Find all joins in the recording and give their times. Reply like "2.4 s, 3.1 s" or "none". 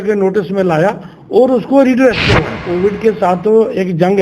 2.6 s